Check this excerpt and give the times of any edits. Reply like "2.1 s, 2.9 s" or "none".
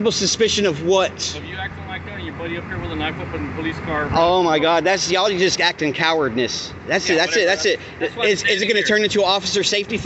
none